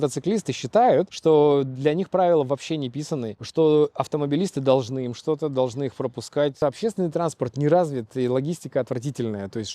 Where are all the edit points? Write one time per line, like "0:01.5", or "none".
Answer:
0:01.1
0:03.4
0:06.6